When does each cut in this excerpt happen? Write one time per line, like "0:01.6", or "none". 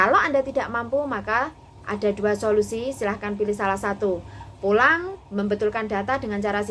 none